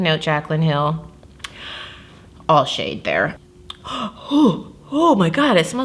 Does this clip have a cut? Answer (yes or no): yes